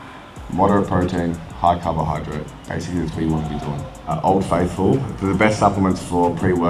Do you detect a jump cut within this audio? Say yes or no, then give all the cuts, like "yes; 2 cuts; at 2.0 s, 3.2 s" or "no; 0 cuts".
yes; 2 cuts; at 2.6 s, 4.2 s